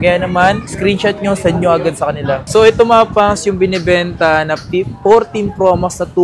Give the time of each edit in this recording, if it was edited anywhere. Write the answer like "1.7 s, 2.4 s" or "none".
2.4 s